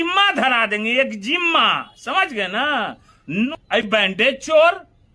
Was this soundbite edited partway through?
yes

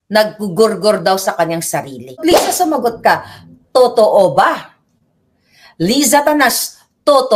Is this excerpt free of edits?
no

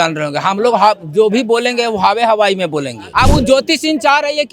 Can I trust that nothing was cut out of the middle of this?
no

